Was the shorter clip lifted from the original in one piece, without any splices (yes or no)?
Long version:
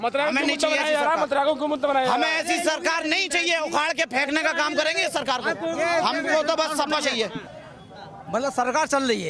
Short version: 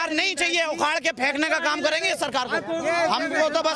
yes